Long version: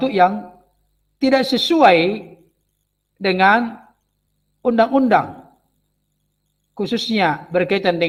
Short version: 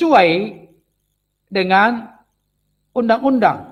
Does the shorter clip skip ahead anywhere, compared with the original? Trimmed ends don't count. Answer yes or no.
no